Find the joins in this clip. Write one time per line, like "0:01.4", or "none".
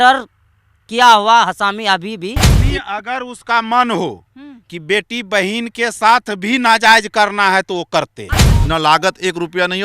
0:02.6
0:08.5